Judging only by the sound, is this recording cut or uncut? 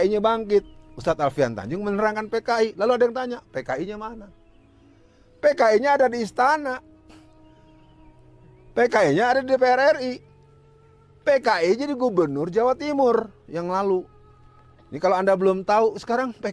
uncut